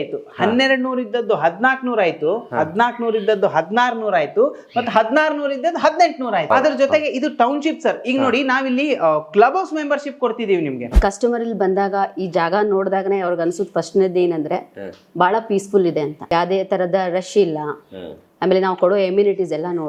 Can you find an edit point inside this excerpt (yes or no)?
yes